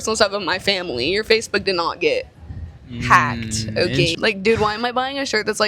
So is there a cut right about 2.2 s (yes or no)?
no